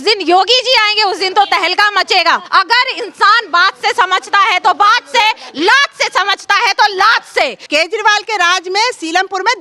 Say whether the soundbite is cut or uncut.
cut